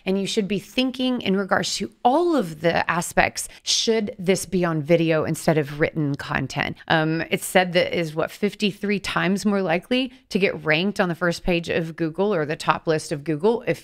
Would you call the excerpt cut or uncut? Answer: cut